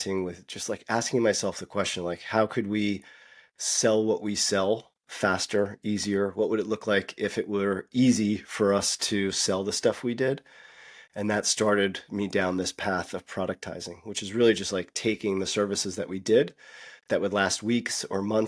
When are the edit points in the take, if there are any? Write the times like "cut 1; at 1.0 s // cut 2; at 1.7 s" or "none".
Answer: none